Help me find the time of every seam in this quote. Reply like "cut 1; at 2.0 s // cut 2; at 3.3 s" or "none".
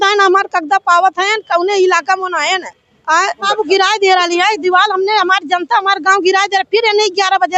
none

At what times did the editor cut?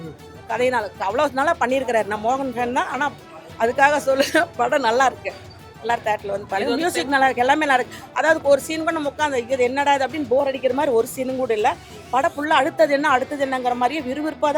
none

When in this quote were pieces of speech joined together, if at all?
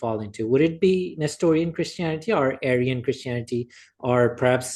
none

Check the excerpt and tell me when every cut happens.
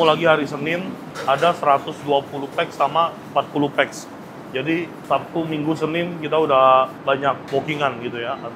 none

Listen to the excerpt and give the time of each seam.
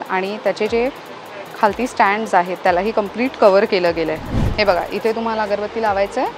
cut 1; at 4.4 s

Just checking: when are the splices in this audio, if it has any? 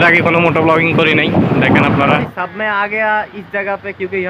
cut 1; at 2.3 s

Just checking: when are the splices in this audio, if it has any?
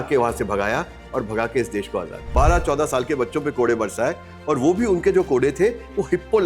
cut 1; at 2.3 s

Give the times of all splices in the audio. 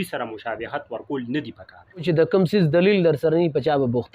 cut 1; at 2.0 s

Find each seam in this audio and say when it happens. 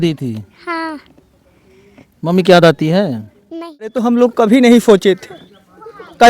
cut 1; at 4.0 s

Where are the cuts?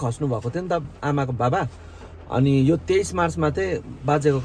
none

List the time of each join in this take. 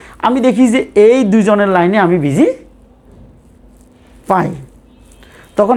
none

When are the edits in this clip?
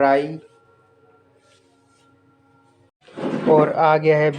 cut 1; at 2.9 s

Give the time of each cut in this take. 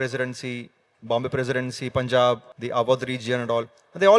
cut 1; at 2.5 s

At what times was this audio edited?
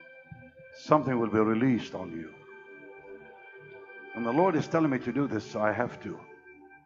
none

